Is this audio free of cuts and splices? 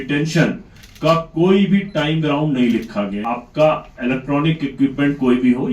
no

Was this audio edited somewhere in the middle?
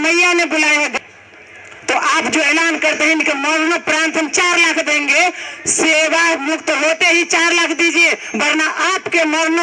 yes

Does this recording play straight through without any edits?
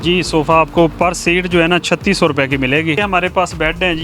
no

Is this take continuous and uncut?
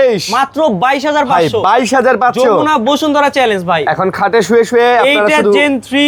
yes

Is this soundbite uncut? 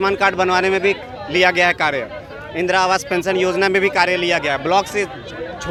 yes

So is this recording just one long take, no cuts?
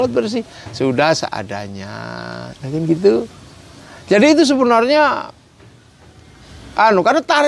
yes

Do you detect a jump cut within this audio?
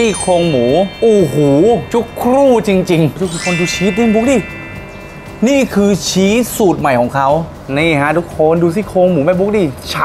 yes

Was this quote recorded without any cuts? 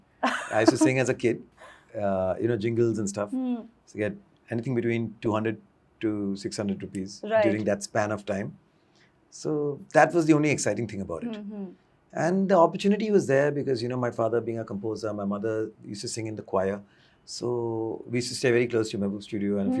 yes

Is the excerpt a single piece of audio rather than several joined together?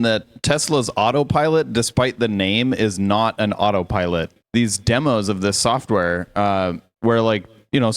no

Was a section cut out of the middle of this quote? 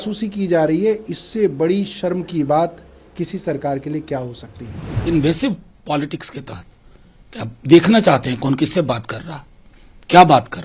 yes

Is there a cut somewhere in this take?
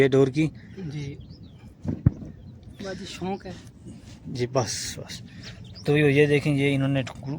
no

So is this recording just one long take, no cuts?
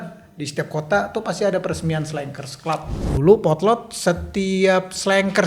no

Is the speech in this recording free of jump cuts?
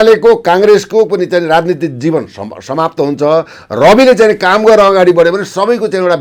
yes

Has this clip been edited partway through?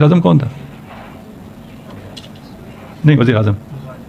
no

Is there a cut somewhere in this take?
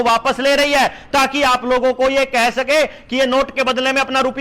no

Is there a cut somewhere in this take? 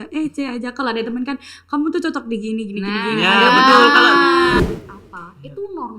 yes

